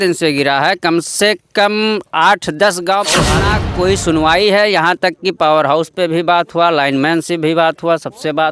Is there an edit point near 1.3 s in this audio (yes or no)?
no